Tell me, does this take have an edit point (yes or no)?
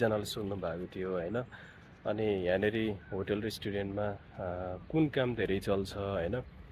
no